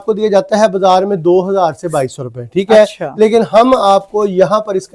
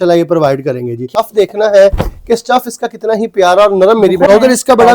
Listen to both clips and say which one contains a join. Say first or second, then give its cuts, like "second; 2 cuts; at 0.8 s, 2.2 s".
second; 2 cuts; at 1.1 s, 4.3 s